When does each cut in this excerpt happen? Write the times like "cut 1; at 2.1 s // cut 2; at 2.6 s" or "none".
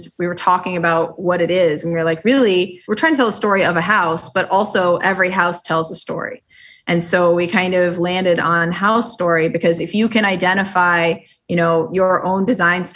cut 1; at 2.8 s